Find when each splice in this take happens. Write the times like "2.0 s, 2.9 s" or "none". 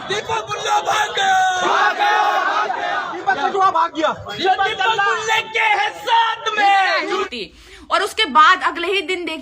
7.3 s